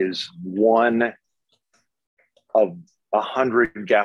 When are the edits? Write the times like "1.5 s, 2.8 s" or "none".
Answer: none